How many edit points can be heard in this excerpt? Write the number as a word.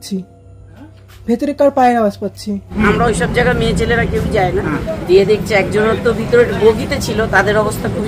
two